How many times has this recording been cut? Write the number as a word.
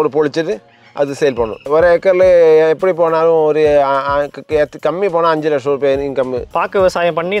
two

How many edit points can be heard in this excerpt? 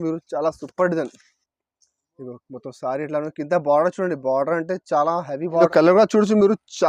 one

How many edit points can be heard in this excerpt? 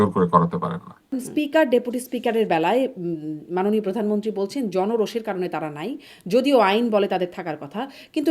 one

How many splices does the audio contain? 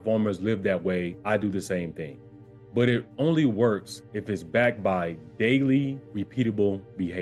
one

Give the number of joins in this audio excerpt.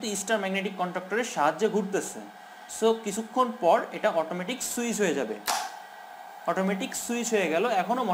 zero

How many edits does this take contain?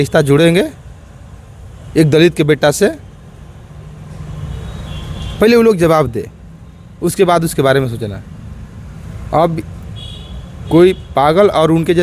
zero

